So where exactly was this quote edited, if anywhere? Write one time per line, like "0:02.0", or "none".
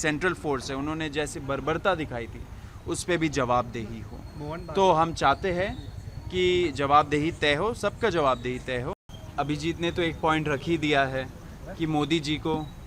0:09.0